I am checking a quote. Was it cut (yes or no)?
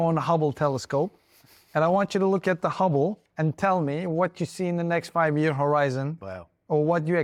no